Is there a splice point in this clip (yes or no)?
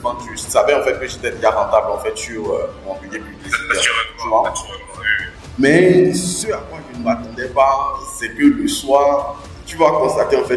no